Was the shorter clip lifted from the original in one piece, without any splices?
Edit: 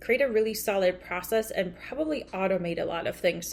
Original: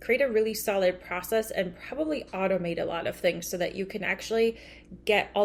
yes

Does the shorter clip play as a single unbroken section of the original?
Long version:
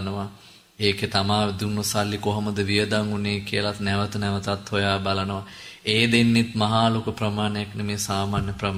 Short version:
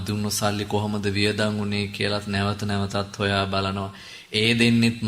yes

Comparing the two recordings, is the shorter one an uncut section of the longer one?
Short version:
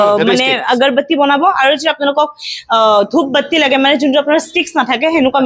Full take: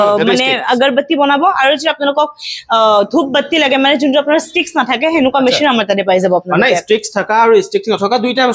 yes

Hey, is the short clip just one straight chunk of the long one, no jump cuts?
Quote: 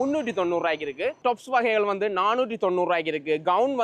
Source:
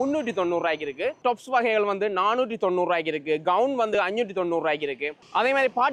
yes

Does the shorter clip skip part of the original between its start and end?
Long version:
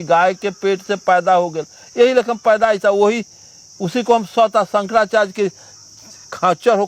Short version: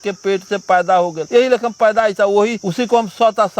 yes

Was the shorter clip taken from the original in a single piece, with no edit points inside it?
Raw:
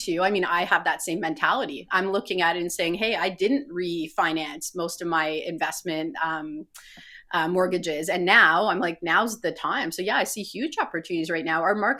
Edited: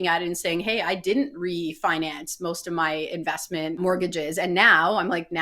no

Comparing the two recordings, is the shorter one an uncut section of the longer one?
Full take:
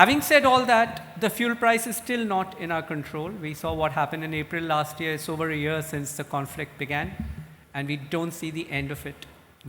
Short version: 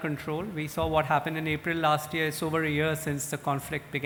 yes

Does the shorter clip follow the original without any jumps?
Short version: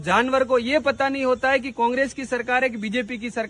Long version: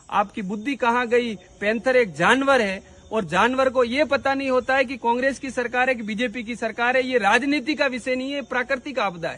yes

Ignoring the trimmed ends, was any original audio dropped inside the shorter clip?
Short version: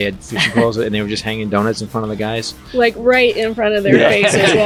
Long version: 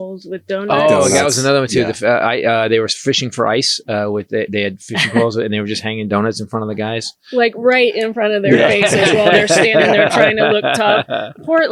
no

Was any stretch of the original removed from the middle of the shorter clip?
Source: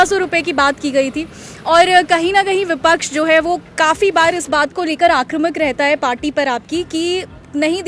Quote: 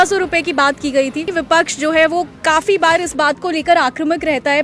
yes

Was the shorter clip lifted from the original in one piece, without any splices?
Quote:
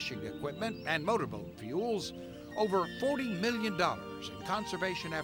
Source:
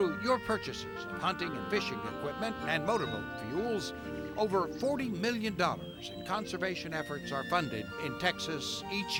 yes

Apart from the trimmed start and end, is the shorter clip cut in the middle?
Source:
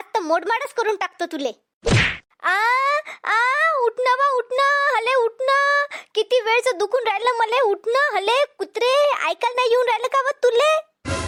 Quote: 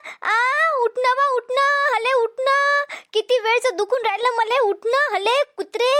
no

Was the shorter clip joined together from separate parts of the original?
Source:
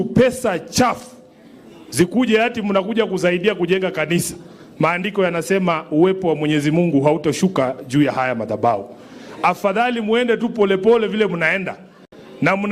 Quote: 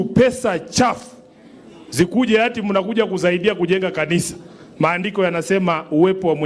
no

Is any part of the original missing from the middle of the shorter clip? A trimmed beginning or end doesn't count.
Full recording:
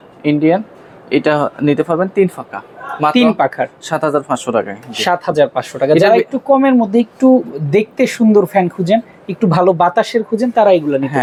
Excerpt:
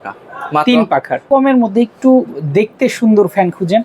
yes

